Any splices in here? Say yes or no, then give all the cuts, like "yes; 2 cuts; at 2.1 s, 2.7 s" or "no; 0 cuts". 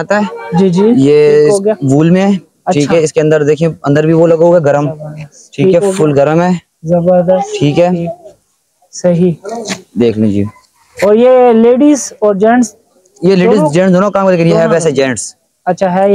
no; 0 cuts